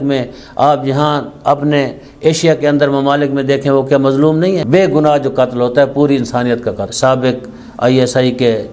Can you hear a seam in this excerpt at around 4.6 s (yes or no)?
yes